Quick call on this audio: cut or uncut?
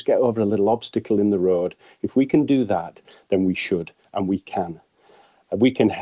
uncut